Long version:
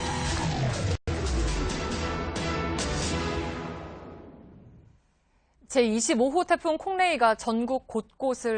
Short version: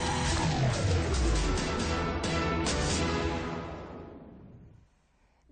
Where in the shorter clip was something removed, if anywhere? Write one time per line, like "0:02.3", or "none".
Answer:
0:00.9